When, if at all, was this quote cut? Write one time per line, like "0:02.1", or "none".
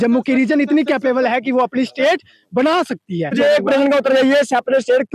0:03.3